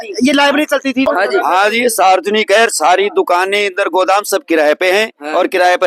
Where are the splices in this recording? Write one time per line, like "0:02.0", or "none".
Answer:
0:01.1

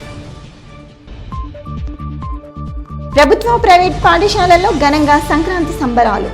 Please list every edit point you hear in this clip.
0:02.0

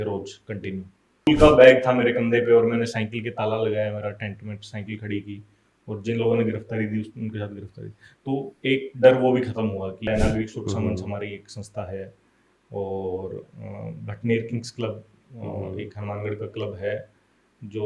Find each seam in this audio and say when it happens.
0:01.3
0:10.1

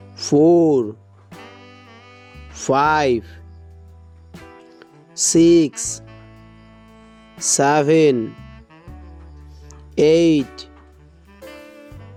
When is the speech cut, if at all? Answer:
none

